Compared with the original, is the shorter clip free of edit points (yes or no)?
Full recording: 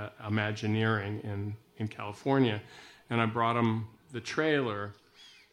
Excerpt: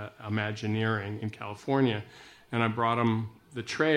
no